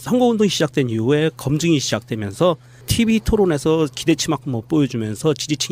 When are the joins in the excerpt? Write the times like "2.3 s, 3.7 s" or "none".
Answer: 2.6 s